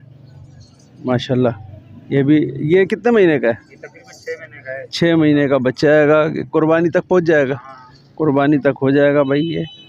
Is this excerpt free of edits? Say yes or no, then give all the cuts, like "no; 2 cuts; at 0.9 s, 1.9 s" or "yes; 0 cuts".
yes; 0 cuts